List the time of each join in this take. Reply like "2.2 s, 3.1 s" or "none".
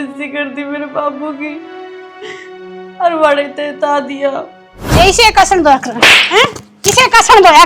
4.8 s

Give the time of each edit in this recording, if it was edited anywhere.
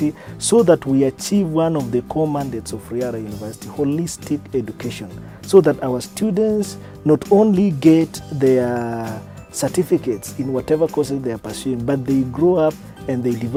none

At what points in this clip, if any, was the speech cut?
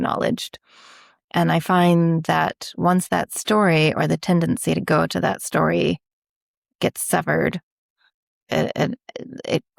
none

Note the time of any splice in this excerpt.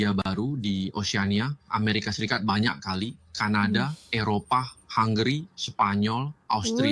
none

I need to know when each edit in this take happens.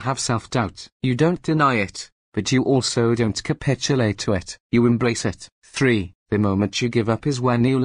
6.0 s

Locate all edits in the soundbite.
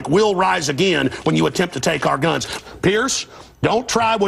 none

